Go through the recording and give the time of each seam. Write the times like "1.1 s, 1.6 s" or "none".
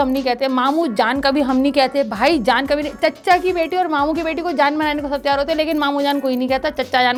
none